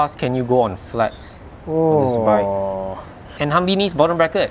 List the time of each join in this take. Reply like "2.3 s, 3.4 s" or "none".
3.3 s